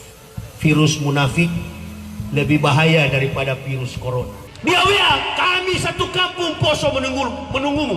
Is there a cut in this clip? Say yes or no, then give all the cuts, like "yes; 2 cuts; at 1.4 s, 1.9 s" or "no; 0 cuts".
yes; 1 cut; at 4.4 s